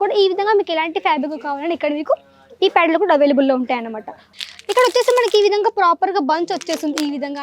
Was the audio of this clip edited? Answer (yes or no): yes